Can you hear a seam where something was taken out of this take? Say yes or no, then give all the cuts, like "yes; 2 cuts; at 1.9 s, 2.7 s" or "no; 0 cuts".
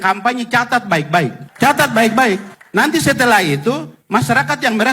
no; 0 cuts